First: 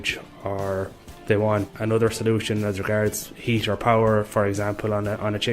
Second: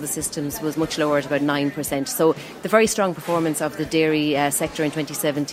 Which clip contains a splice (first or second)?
first